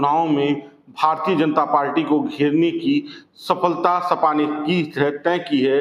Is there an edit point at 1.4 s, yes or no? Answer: no